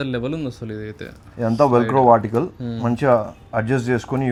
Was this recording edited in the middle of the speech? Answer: no; 0 cuts

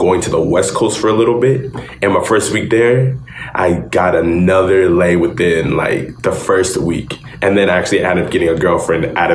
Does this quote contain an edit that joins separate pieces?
no; 0 cuts

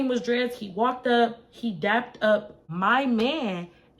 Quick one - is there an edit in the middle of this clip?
yes; 1 cut; at 2.6 s

